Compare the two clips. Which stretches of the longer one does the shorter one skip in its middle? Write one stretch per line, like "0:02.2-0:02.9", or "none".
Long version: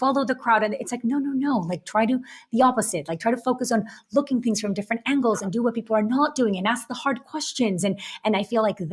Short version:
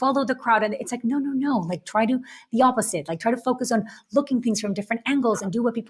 none